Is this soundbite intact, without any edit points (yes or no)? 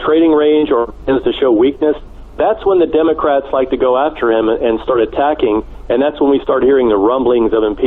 yes